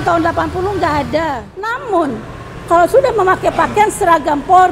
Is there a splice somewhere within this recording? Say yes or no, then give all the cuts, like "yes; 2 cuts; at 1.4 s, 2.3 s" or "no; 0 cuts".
yes; 1 cut; at 1.8 s